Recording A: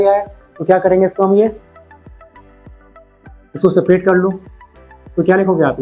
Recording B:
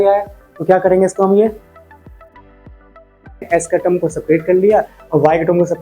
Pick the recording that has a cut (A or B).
B